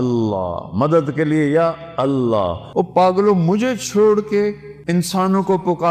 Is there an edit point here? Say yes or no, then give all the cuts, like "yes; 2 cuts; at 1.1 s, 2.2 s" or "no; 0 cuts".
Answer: yes; 2 cuts; at 2.6 s, 4.7 s